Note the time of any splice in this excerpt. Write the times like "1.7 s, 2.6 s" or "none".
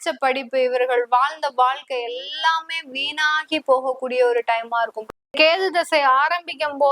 5.3 s